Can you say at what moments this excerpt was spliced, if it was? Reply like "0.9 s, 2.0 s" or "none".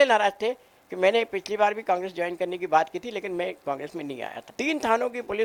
4.4 s